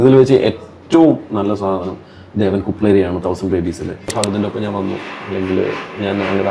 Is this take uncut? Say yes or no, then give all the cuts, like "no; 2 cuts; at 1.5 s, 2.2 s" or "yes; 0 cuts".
no; 1 cut; at 4.1 s